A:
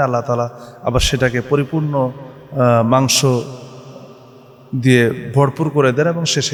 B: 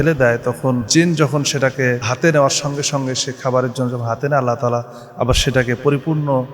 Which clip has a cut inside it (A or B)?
B